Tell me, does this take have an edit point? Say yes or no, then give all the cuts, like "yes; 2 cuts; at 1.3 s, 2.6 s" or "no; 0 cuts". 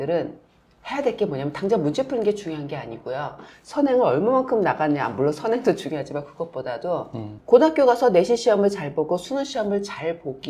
yes; 1 cut; at 7.4 s